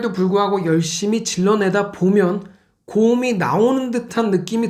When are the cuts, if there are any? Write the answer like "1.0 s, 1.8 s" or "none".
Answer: none